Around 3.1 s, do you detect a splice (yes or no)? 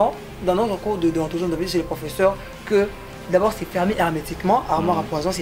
no